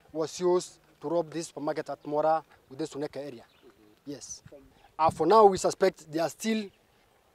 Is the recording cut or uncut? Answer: uncut